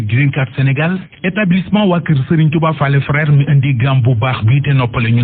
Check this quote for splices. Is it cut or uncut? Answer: cut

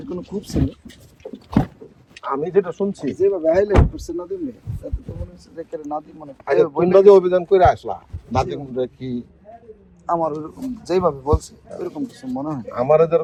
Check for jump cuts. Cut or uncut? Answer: uncut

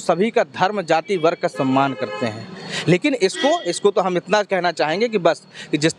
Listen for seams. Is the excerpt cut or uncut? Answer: uncut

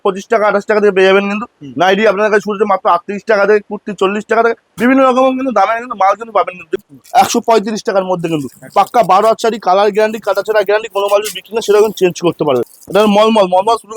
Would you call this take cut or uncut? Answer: cut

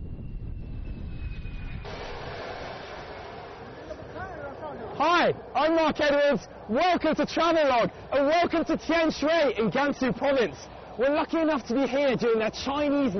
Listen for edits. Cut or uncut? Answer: uncut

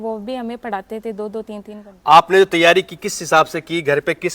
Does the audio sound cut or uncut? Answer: uncut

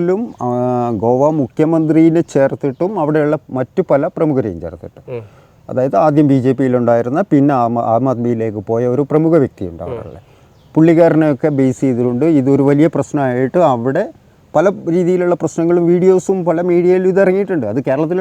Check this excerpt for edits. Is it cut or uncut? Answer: uncut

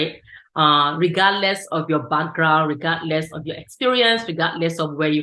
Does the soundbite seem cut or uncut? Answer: uncut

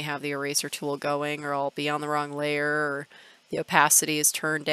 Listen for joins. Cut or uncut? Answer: uncut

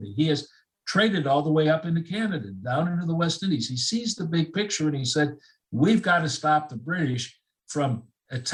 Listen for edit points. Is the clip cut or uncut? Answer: uncut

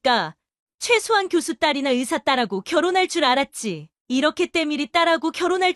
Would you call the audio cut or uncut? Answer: uncut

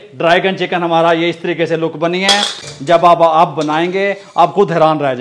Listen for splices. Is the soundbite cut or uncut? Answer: cut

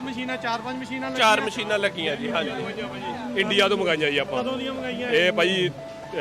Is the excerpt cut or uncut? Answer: uncut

